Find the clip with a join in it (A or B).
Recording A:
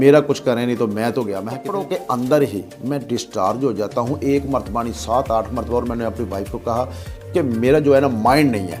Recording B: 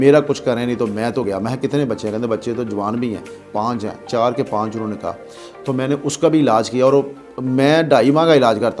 A